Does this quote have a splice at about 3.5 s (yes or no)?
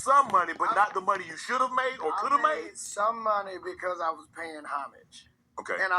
yes